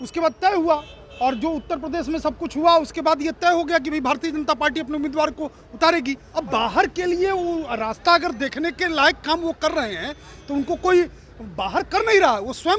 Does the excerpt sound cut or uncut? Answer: cut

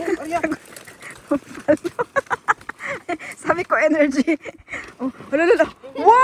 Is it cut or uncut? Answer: uncut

